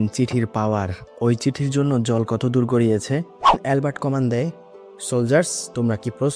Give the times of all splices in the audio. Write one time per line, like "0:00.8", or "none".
0:03.6